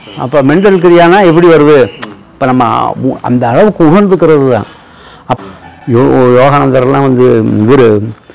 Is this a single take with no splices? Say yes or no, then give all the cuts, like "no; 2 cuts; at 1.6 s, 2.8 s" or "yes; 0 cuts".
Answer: no; 1 cut; at 5.3 s